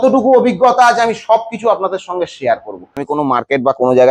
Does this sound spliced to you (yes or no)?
yes